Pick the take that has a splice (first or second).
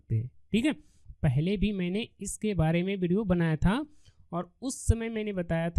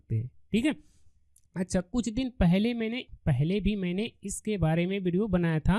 first